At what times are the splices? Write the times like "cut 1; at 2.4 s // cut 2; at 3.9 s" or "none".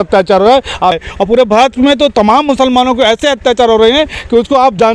cut 1; at 1.0 s